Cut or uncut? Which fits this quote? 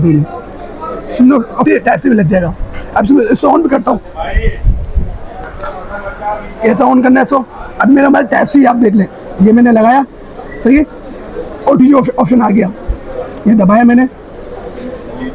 cut